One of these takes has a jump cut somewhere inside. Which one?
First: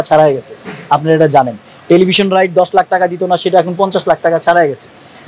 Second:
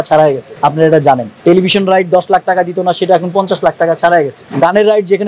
second; 2 cuts; at 1.0 s, 4.4 s

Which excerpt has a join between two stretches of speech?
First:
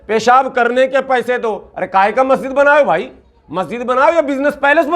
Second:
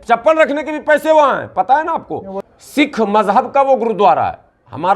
second; 1 cut; at 2.4 s

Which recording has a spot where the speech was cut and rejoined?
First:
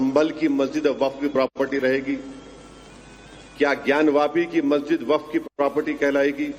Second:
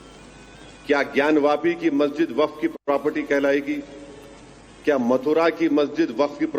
second; 1 cut; at 5.0 s

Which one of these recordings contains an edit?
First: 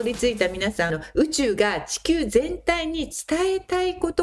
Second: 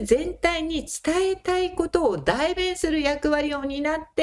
first; 1 cut; at 0.9 s

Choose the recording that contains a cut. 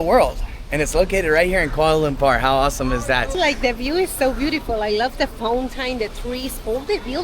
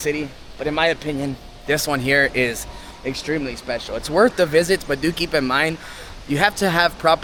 first; 1 cut; at 3.4 s

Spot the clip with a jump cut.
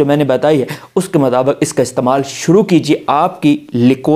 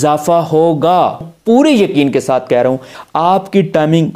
second; 2 cuts; at 1.3 s, 2.9 s

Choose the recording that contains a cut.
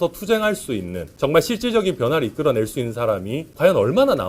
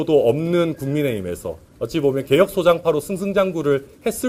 first; 2 cuts; at 1.0 s, 3.4 s

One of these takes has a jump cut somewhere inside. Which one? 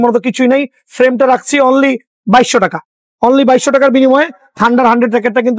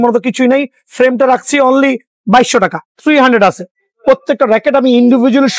second; 1 cut; at 2.9 s

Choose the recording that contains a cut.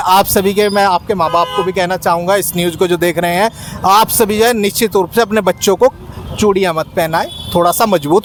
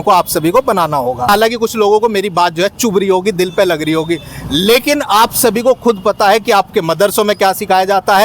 second; 1 cut; at 1.3 s

